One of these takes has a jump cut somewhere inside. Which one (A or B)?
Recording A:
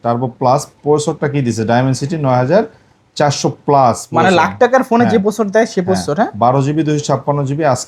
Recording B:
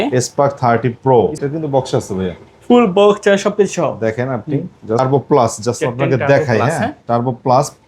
B